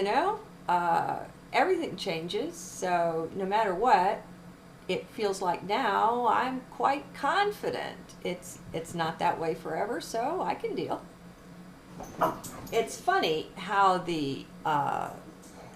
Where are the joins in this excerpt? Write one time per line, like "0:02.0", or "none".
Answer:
0:11.9